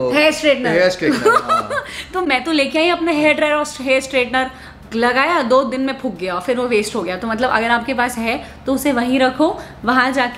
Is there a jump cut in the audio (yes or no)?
no